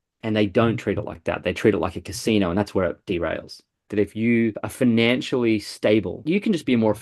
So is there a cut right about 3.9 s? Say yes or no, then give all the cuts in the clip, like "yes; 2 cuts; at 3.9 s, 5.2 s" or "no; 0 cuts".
yes; 3 cuts; at 3.9 s, 4.6 s, 6.2 s